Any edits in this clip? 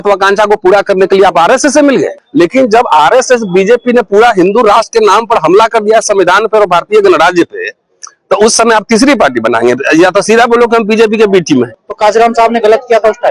yes; 2 cuts; at 2.2 s, 11.8 s

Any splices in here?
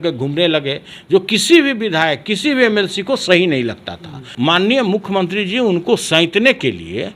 yes; 1 cut; at 4.3 s

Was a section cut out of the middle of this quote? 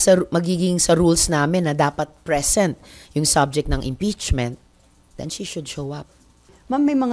no; 0 cuts

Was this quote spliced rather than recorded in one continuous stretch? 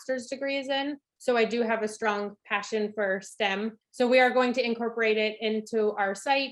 yes; 1 cut; at 3.8 s

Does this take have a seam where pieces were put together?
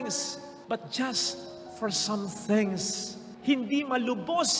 no; 0 cuts

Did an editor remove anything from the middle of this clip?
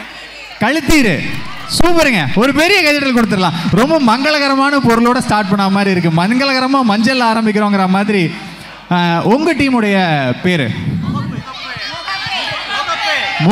no; 0 cuts

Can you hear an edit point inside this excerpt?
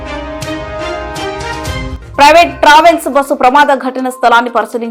no; 0 cuts

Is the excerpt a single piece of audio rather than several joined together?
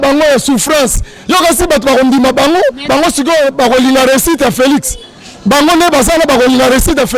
no; 1 cut; at 2.9 s

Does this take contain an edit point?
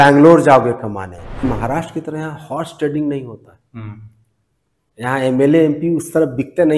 yes; 1 cut; at 1.5 s

